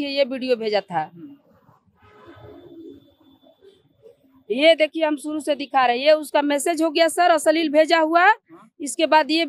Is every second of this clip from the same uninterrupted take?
yes; 0 cuts

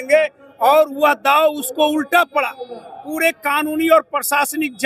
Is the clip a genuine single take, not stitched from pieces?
yes; 0 cuts

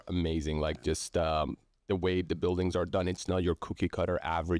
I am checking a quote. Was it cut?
no; 0 cuts

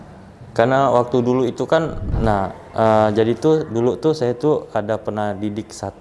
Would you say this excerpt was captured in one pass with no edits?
no; 1 cut; at 2.1 s

